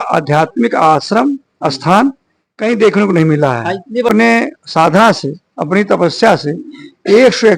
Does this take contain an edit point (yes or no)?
yes